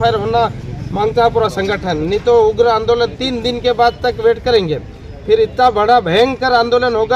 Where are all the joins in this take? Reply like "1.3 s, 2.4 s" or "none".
none